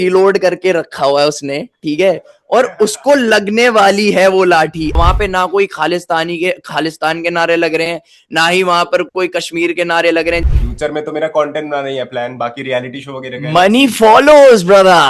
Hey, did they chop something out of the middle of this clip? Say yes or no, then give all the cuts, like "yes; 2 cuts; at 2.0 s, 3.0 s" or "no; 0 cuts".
yes; 2 cuts; at 5.0 s, 10.4 s